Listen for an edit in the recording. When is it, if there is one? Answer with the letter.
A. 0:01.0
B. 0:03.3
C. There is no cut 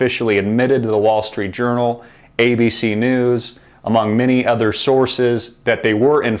A